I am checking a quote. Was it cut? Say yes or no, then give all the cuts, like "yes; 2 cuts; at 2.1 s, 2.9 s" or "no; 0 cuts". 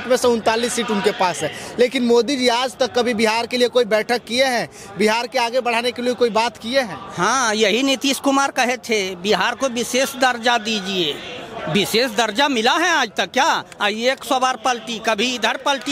no; 0 cuts